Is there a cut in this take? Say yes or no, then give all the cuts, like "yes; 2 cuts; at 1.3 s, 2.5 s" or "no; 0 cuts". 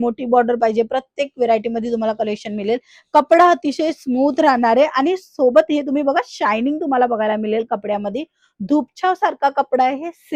no; 0 cuts